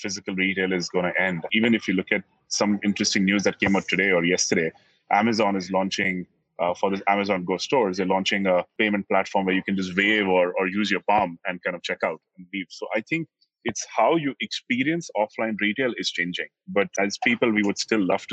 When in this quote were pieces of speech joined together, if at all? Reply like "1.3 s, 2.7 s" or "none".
1.5 s, 8.7 s, 16.9 s